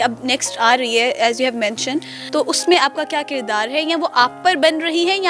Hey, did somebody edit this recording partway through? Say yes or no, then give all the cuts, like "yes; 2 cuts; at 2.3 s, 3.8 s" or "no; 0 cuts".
yes; 1 cut; at 2.2 s